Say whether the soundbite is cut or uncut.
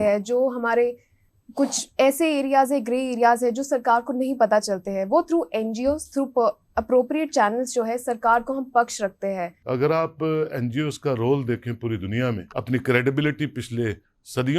cut